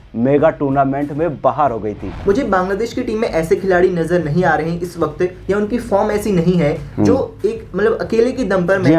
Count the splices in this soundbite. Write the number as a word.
one